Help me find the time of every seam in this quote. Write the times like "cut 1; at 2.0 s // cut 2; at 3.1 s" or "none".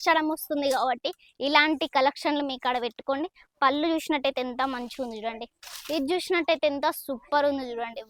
none